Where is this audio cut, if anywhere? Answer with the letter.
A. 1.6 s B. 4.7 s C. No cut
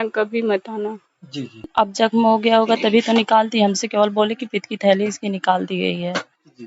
A